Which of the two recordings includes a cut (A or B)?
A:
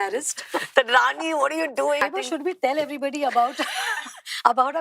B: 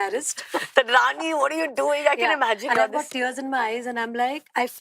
A